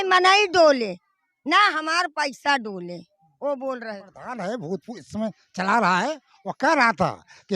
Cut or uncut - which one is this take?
cut